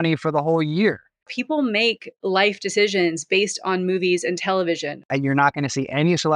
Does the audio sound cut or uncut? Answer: cut